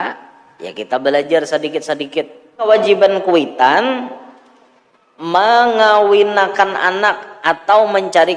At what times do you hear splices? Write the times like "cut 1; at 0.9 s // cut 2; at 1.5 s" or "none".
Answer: cut 1; at 2.7 s